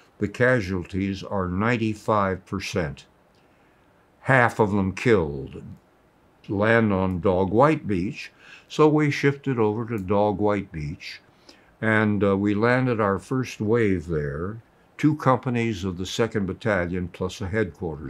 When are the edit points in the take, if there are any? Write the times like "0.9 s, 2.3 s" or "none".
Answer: none